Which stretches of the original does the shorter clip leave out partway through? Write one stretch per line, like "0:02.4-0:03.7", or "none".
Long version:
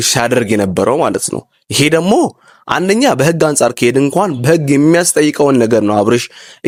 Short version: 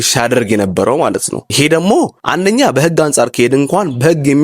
0:01.4-0:01.6
0:02.4-0:02.6